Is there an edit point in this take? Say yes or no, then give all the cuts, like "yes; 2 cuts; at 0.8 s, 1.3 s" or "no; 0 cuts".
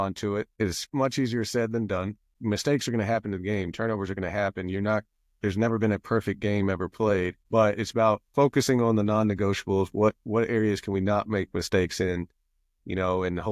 yes; 2 cuts; at 2.3 s, 8.3 s